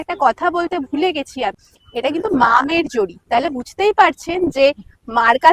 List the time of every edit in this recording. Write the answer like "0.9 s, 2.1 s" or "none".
1.6 s